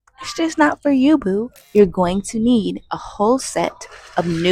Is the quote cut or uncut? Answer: cut